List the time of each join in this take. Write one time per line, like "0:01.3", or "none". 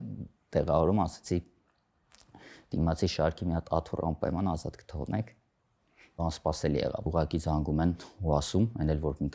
0:06.2
0:07.1